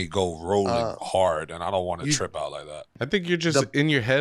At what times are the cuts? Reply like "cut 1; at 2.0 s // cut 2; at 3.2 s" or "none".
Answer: cut 1; at 2.9 s